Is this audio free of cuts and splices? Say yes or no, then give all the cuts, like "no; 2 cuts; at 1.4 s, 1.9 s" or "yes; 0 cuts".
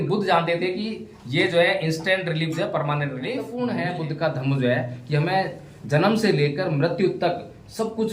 no; 1 cut; at 3.5 s